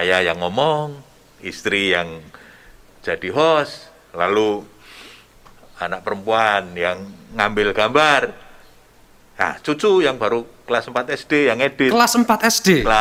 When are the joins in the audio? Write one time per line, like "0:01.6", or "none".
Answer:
none